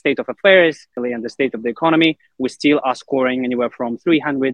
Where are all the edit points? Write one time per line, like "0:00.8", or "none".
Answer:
0:00.9